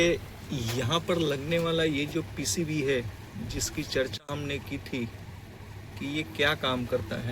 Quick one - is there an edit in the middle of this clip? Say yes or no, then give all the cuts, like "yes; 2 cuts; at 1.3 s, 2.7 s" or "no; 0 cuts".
no; 0 cuts